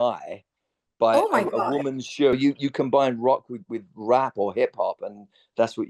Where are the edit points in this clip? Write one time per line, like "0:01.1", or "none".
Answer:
0:02.4